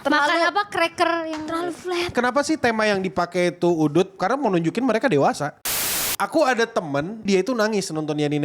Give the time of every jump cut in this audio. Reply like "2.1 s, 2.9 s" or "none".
2.1 s, 4.2 s, 5.7 s, 7.2 s